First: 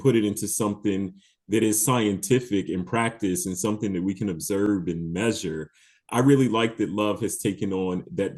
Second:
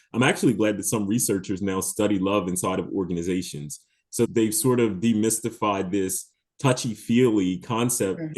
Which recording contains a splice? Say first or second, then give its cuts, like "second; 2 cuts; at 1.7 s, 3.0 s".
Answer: second; 1 cut; at 4.3 s